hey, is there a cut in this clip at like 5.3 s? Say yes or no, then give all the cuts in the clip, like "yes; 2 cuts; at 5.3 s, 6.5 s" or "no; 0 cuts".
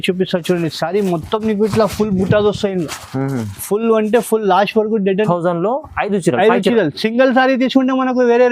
yes; 1 cut; at 5.3 s